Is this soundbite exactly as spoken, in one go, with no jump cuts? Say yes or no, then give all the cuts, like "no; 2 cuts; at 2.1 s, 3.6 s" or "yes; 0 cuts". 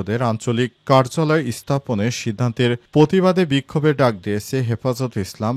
yes; 0 cuts